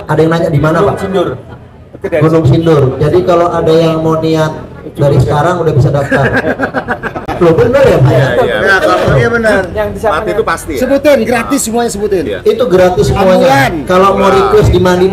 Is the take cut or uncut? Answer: uncut